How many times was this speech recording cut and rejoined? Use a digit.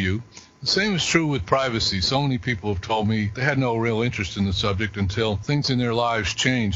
2